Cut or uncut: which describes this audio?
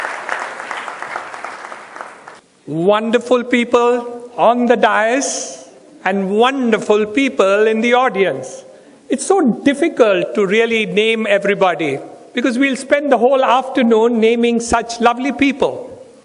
uncut